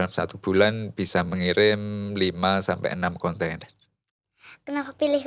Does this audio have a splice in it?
yes; 1 cut; at 4.1 s

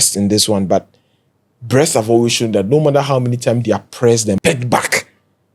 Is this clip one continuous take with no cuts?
no; 1 cut; at 4.4 s

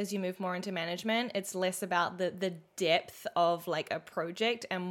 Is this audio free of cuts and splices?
yes; 0 cuts

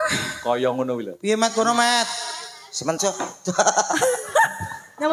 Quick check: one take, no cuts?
no; 1 cut; at 3.0 s

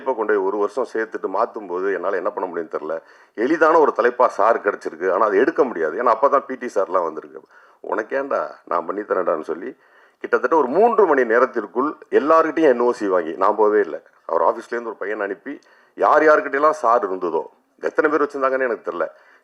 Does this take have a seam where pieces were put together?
no; 0 cuts

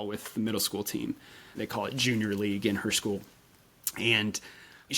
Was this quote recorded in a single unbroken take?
no; 1 cut; at 1.5 s

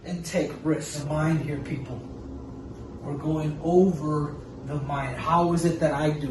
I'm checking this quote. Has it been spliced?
yes; 1 cut; at 1.0 s

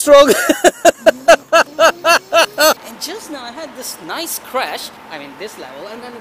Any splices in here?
yes; 2 cuts; at 2.8 s, 5.0 s

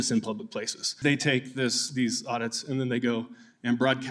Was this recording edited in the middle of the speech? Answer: yes; 1 cut; at 1.0 s

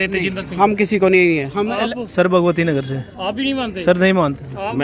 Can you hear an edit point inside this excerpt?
no; 0 cuts

